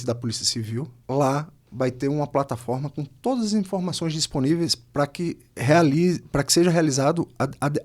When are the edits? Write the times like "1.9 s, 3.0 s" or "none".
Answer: 1.0 s